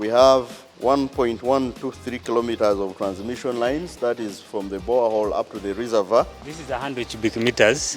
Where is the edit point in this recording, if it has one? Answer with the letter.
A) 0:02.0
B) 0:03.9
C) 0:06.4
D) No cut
C